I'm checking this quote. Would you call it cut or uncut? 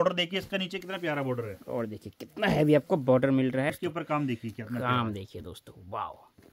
cut